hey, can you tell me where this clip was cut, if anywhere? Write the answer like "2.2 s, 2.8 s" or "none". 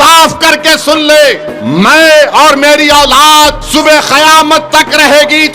1.3 s, 3.6 s